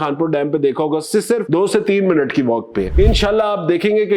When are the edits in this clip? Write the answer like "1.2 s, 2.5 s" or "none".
2.9 s